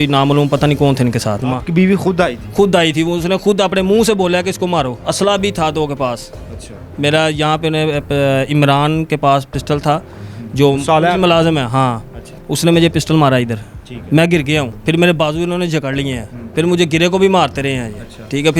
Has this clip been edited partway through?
yes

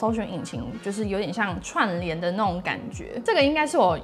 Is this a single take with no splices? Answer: no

